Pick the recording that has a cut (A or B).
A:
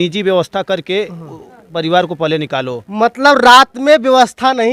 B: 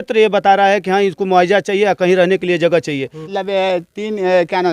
B